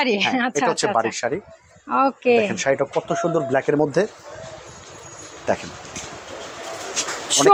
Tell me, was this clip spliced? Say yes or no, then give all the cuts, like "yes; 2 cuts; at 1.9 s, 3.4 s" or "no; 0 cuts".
no; 0 cuts